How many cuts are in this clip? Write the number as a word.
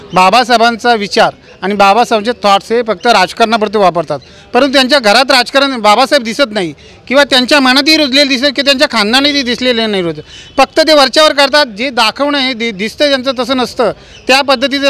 zero